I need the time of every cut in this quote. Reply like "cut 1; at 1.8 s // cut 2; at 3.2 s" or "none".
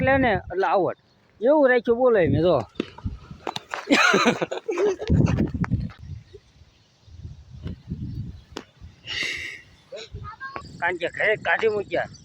cut 1; at 2.7 s // cut 2; at 6.0 s // cut 3; at 10.5 s